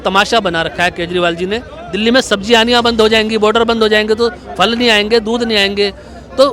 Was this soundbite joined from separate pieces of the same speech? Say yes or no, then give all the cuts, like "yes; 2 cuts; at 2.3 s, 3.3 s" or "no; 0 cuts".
yes; 1 cut; at 1.7 s